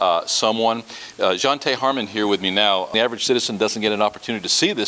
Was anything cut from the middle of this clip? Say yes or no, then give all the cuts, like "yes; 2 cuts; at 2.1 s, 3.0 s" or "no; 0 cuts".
yes; 1 cut; at 2.9 s